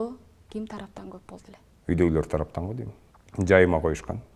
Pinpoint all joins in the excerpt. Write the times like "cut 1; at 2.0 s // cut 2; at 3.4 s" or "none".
none